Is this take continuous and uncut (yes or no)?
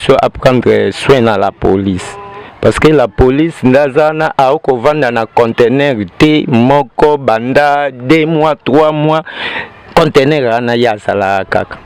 yes